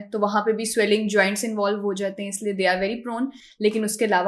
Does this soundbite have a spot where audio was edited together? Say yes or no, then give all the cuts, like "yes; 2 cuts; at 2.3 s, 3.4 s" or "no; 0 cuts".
no; 0 cuts